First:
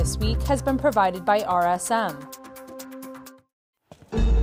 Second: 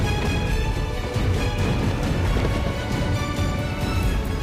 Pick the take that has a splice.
first; 2 cuts; at 2.2 s, 3.3 s

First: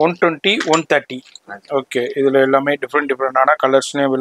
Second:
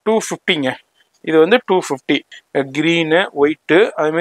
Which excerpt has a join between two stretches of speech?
second; 1 cut; at 2.3 s

